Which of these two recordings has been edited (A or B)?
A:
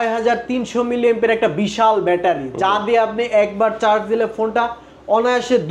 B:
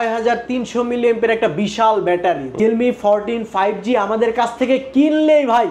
B